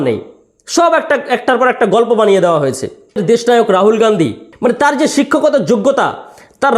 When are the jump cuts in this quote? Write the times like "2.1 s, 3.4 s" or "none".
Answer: 3.2 s, 4.4 s